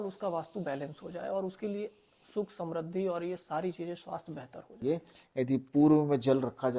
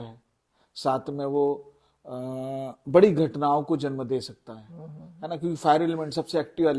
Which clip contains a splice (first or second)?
first